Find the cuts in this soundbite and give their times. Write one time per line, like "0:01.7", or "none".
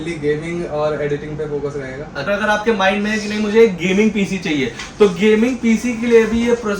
0:02.3